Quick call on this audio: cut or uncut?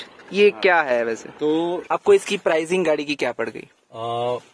cut